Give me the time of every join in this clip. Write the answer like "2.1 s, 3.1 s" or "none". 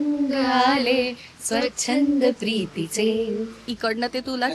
3.6 s